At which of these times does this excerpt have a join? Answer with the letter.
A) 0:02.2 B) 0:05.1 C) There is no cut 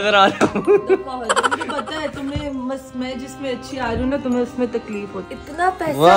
B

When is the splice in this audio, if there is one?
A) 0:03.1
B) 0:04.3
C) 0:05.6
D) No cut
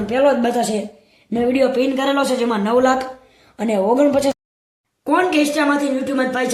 B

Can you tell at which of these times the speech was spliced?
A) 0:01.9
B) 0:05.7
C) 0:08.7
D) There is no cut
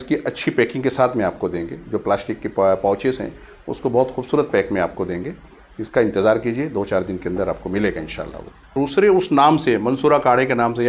C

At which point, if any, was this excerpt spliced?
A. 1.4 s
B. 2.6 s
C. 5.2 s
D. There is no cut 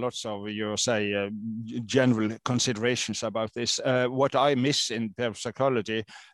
D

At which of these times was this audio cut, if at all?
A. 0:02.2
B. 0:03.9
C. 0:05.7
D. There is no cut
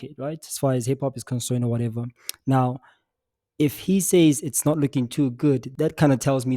C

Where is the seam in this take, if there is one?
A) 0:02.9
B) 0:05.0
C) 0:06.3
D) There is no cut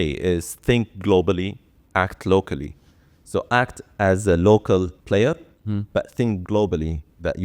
B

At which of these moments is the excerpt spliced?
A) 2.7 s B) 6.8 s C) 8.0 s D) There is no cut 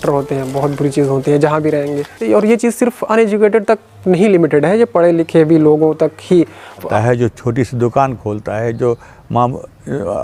B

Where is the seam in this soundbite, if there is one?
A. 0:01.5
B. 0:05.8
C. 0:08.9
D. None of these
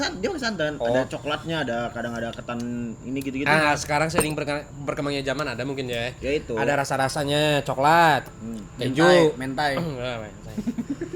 D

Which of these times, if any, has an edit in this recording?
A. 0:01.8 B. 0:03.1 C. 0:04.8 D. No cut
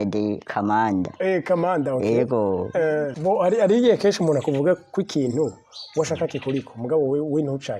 B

